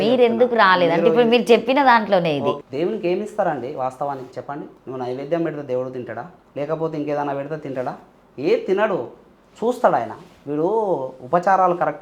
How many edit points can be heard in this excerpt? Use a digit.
3